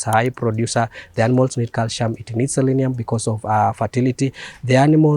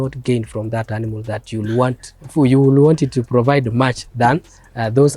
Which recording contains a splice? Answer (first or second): second